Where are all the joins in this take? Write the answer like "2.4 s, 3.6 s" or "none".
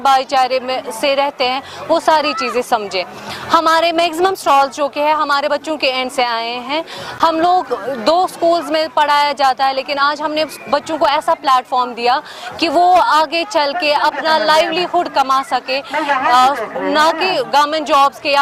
none